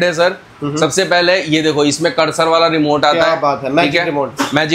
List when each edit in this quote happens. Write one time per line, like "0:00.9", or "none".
none